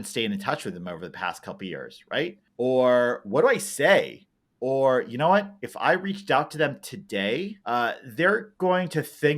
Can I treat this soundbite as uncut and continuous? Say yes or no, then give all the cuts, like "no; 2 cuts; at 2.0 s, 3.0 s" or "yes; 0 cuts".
no; 2 cuts; at 2.4 s, 7.6 s